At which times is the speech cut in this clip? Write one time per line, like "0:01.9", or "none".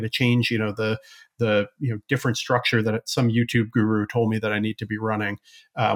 none